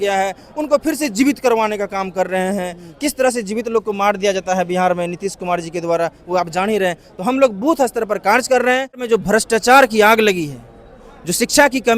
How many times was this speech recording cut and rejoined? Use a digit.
1